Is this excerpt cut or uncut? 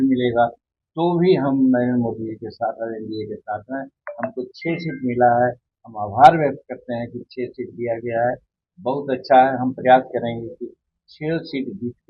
uncut